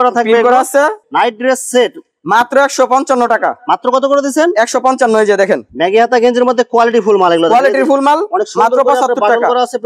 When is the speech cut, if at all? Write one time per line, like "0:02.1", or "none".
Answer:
0:01.0
0:05.7